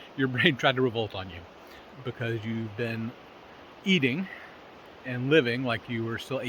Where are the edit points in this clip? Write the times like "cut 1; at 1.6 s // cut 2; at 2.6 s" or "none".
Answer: none